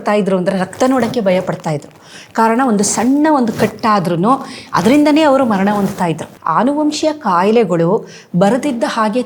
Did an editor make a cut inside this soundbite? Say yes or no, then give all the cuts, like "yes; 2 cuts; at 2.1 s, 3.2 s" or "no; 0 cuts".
yes; 1 cut; at 6.3 s